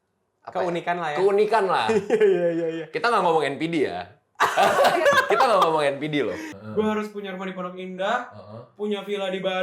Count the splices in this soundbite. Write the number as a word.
one